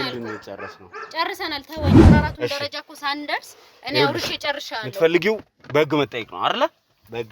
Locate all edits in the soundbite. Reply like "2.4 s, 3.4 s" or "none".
1.7 s, 2.3 s